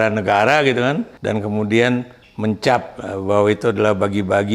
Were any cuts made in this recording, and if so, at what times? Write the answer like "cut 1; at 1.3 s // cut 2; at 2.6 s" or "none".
cut 1; at 1.1 s